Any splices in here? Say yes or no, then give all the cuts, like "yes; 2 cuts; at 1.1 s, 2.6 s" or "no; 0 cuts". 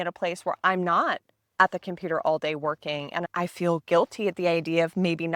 no; 0 cuts